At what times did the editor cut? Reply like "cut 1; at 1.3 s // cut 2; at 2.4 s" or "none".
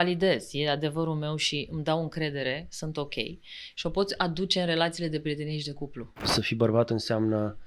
cut 1; at 6.3 s